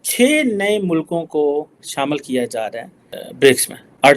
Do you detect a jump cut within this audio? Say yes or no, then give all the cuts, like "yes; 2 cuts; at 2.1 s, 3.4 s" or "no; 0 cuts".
yes; 1 cut; at 1.7 s